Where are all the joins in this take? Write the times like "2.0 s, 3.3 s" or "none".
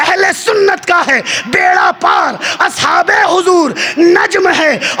none